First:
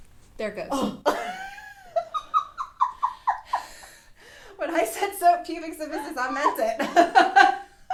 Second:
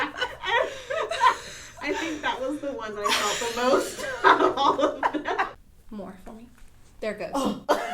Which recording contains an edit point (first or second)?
second